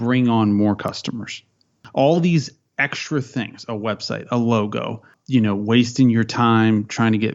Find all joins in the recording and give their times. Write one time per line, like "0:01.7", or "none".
0:01.8